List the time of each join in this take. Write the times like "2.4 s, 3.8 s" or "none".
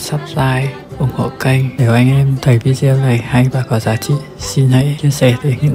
none